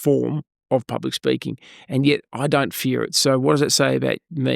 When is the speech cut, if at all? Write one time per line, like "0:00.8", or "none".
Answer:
none